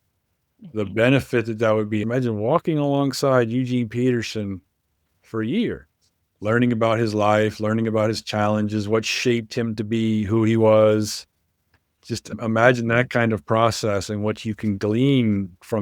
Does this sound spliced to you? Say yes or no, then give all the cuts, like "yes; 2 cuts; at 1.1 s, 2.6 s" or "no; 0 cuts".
yes; 2 cuts; at 2.0 s, 12.3 s